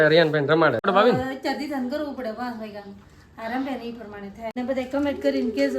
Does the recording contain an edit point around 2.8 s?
no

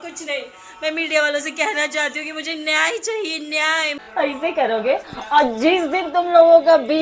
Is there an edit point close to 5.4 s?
no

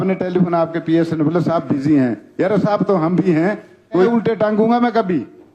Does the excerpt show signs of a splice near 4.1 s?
yes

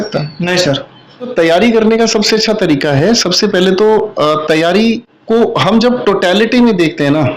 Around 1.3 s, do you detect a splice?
yes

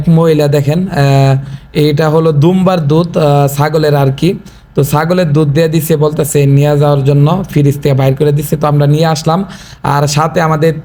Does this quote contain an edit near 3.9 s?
no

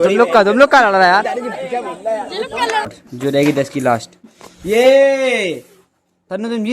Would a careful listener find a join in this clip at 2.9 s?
yes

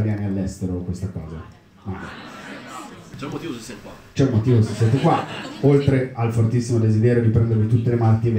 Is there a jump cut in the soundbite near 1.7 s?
no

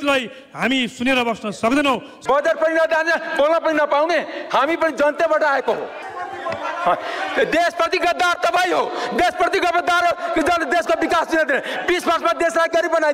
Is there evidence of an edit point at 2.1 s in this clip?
yes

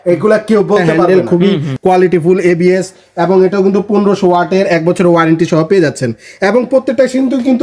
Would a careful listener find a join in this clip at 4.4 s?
no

